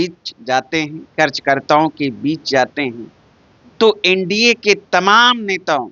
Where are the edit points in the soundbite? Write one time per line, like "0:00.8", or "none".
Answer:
none